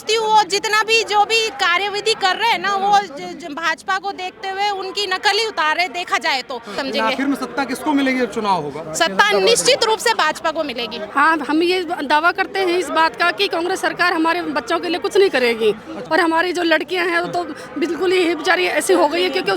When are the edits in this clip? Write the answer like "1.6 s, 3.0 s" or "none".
6.8 s, 11.0 s, 16.0 s